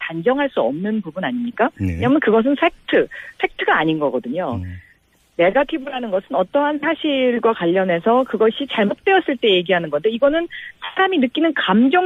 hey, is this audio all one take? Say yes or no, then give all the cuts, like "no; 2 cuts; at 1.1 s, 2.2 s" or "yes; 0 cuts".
no; 1 cut; at 9.6 s